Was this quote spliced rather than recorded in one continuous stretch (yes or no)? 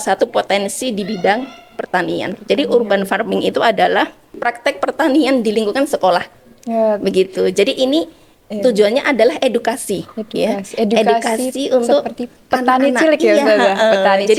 no